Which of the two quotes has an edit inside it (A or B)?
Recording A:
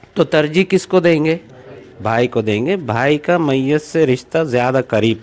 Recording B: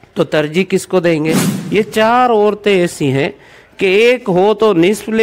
B